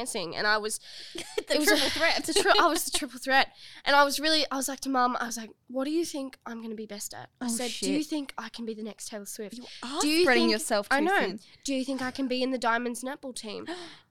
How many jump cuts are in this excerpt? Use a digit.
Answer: 1